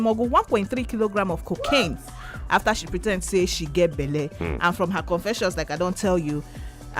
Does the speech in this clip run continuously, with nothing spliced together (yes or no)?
yes